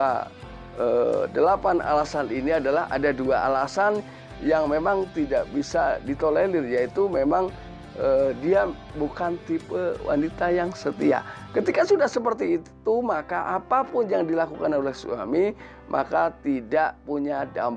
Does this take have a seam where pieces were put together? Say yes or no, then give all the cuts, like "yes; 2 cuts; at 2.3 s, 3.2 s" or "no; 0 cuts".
no; 0 cuts